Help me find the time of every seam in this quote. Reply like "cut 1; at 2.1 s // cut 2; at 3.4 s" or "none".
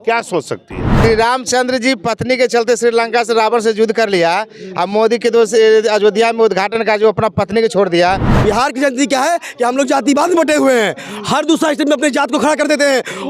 cut 1; at 0.9 s // cut 2; at 8.3 s